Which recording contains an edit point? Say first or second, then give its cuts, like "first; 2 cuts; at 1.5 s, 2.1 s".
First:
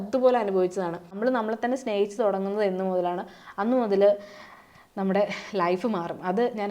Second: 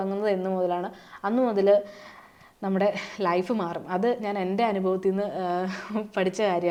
first; 1 cut; at 1.1 s